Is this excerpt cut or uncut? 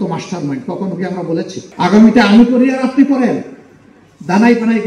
cut